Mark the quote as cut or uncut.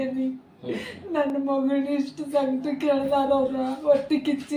uncut